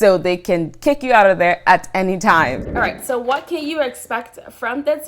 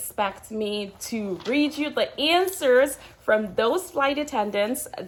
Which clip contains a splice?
first; 1 cut; at 2.7 s

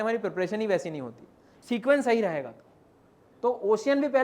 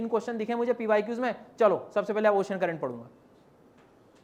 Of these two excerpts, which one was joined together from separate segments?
first; 1 cut; at 1.5 s

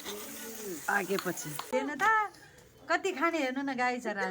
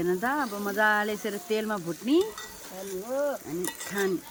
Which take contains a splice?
first; 1 cut; at 1.7 s

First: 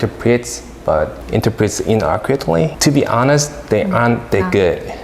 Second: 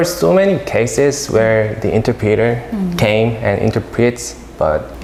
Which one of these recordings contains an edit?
first; 1 cut; at 2.8 s

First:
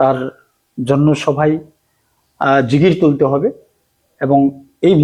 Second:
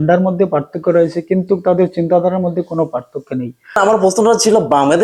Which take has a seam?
second; 1 cut; at 3.8 s

